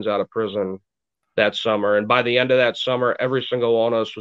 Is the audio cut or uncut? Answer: uncut